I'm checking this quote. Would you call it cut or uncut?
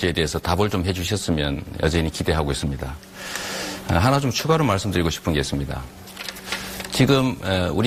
uncut